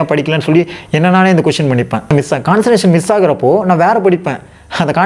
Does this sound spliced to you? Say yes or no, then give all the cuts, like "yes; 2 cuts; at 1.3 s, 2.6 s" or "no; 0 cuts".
yes; 1 cut; at 2.1 s